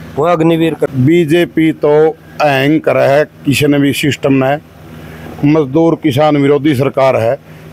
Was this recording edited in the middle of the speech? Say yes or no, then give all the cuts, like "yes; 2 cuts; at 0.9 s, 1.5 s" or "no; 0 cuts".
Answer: yes; 1 cut; at 0.9 s